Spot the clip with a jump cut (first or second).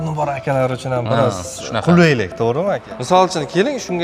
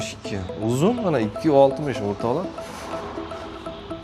first